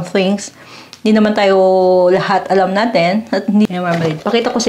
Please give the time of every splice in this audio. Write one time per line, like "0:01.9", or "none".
0:03.6